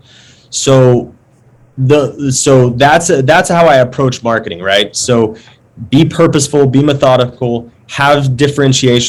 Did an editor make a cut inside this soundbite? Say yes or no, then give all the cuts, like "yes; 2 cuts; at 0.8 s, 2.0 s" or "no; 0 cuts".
no; 0 cuts